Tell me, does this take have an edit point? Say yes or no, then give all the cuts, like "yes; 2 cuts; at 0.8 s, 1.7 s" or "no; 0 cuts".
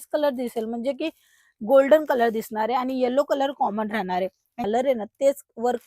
yes; 1 cut; at 4.5 s